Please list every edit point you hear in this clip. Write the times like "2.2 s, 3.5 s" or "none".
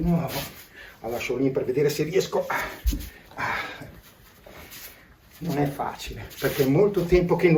none